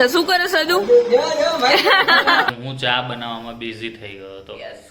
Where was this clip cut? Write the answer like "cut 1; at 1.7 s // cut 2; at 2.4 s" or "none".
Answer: cut 1; at 2.5 s